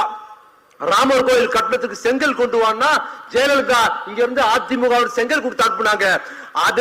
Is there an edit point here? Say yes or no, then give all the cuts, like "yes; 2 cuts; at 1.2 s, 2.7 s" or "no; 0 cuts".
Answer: no; 0 cuts